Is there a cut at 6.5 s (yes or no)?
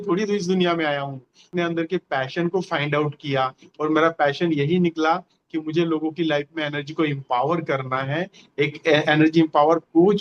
no